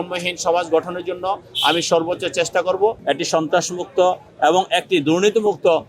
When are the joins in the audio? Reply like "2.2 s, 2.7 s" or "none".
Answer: 3.0 s